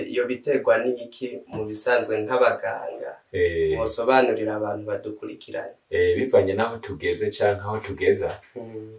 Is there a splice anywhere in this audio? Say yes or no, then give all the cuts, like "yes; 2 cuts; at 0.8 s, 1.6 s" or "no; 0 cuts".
no; 0 cuts